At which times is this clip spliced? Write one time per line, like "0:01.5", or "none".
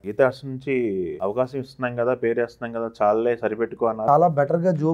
0:01.1
0:04.0

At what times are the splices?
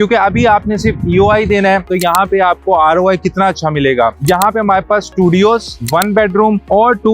0:01.9
0:04.1

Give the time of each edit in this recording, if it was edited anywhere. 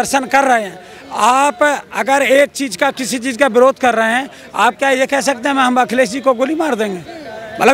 none

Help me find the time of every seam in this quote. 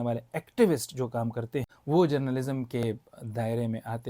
0:01.7

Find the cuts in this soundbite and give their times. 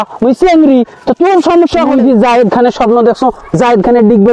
0:01.9

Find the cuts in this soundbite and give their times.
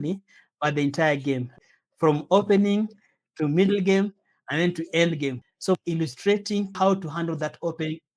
0:01.6
0:05.4
0:06.7

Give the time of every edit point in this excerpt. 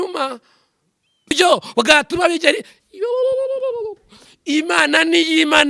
0:01.3

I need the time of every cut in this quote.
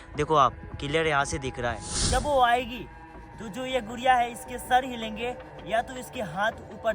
0:02.0

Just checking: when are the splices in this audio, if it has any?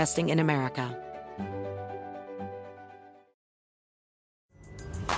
0:00.9

